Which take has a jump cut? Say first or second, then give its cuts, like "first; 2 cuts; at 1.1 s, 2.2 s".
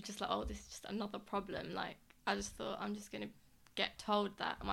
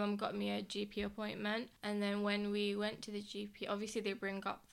second; 1 cut; at 1.7 s